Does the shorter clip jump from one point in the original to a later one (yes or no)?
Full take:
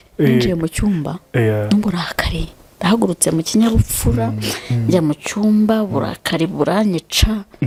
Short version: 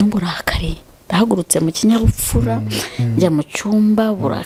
no